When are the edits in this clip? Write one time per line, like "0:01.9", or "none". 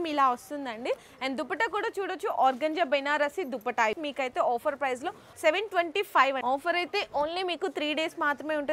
0:04.0
0:06.4